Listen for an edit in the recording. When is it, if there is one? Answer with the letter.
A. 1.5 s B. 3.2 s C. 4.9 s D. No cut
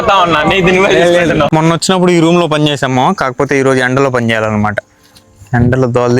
A